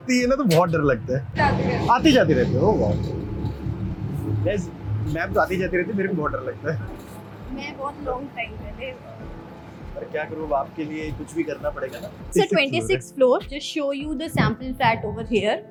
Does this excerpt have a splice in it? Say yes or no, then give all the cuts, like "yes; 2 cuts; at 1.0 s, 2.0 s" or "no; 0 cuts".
no; 0 cuts